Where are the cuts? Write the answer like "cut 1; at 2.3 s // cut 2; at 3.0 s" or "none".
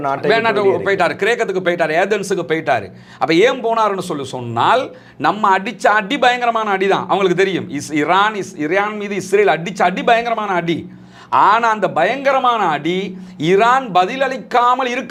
none